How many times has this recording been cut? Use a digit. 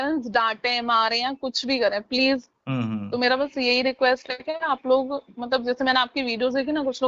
1